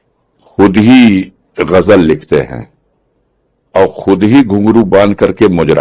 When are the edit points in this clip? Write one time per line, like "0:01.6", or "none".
none

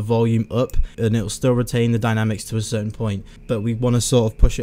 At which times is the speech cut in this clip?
0:00.9
0:03.4

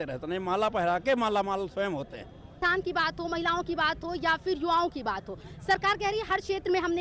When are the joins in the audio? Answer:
none

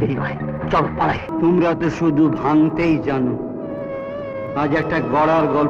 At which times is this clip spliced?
0:01.2

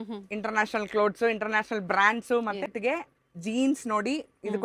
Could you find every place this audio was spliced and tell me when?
0:02.7

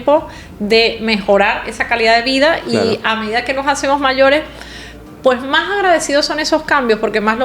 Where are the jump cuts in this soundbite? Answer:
none

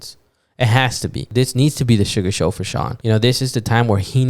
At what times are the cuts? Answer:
0:01.3
0:02.9

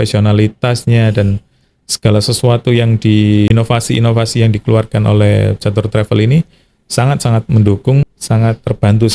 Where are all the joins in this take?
0:03.5
0:08.1

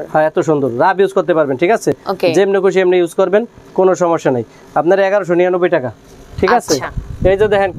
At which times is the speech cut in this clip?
none

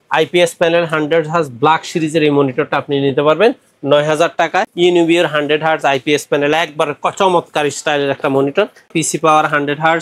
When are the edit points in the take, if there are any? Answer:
0:04.7
0:08.9

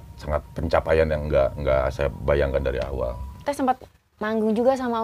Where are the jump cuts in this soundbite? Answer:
0:03.4

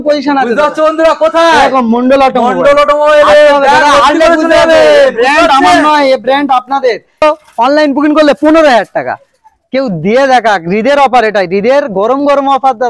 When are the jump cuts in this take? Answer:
0:07.2

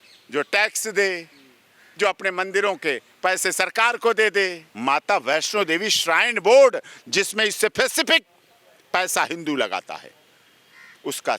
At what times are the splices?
0:04.6

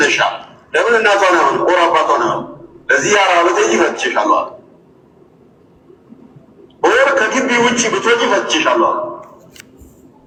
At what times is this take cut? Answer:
none

